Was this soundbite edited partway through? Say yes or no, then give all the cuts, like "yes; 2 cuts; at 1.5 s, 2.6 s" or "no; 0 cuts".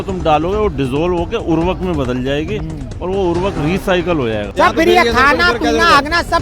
yes; 1 cut; at 4.4 s